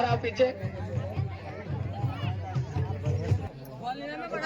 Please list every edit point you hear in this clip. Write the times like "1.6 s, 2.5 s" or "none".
3.5 s